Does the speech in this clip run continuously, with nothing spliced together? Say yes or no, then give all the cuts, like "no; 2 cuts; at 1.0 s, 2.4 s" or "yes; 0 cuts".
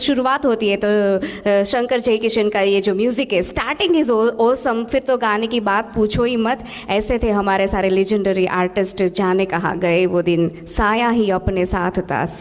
yes; 0 cuts